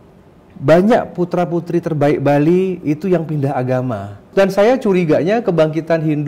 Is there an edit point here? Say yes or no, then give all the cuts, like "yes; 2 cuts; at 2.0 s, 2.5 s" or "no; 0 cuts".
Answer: yes; 1 cut; at 4.3 s